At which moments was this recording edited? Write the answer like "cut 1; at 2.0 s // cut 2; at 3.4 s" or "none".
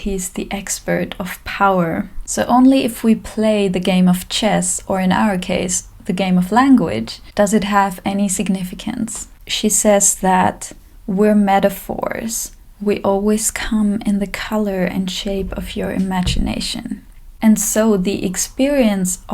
cut 1; at 2.3 s // cut 2; at 9.3 s // cut 3; at 17.3 s